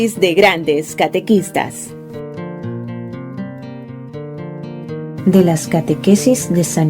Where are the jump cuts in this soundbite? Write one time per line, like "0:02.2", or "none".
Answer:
0:05.1